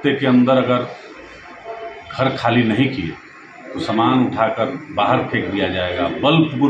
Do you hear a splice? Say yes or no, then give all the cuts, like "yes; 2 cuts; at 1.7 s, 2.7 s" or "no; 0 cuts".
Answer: no; 0 cuts